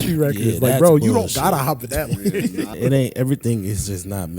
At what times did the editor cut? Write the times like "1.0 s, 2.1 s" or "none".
2.7 s

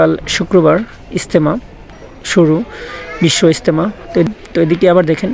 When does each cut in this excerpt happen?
4.3 s

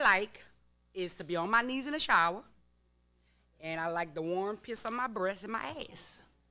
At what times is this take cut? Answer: none

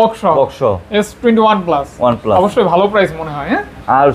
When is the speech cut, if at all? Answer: none

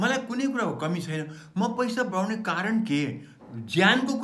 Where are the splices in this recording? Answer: 3.3 s

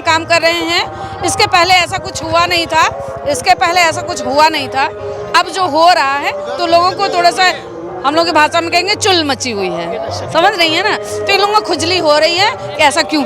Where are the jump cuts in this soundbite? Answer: none

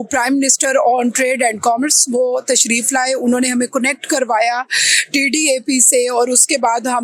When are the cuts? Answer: none

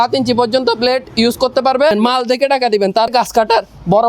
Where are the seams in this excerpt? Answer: 1.9 s, 3.1 s

